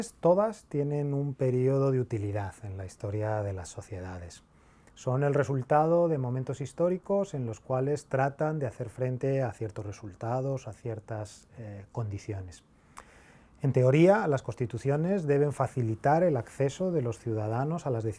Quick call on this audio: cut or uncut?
cut